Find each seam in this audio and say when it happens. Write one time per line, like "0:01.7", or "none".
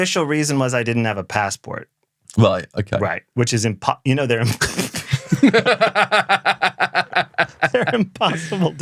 none